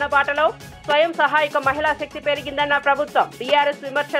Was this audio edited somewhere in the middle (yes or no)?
no